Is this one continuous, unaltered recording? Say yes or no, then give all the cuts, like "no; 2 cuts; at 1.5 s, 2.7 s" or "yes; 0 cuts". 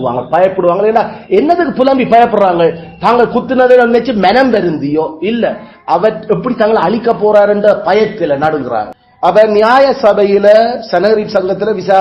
no; 1 cut; at 9.0 s